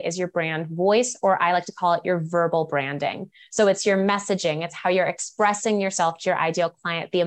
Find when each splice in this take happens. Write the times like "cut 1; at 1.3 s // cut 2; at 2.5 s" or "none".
none